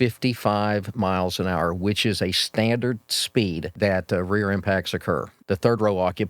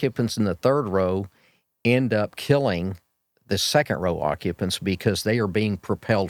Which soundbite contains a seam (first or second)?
first